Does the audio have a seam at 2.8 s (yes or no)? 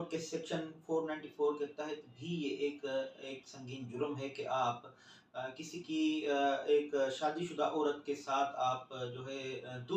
no